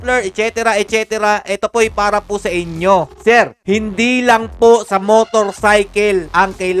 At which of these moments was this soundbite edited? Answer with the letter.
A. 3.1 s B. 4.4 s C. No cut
A